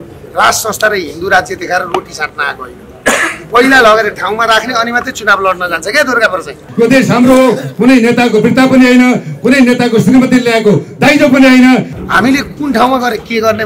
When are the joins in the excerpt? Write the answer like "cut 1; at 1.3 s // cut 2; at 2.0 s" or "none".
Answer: cut 1; at 6.6 s // cut 2; at 11.9 s